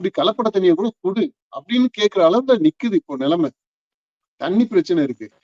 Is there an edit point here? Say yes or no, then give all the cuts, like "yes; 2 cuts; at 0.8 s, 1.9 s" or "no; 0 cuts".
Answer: no; 0 cuts